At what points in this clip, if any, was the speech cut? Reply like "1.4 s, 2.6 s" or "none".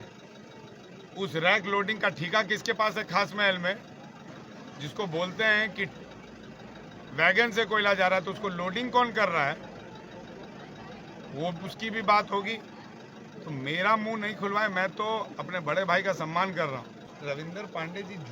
17.0 s